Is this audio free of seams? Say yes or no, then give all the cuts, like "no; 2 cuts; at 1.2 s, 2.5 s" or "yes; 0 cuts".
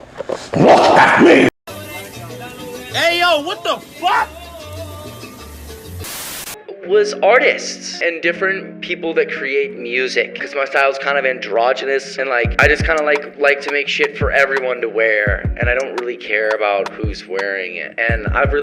yes; 0 cuts